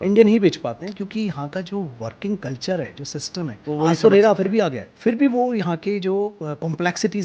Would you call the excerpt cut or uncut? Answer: cut